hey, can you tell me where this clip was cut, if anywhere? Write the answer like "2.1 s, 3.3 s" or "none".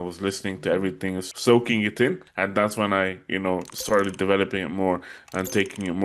1.2 s, 2.3 s